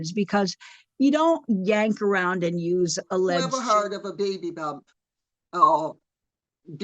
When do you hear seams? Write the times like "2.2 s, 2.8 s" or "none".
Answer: 3.6 s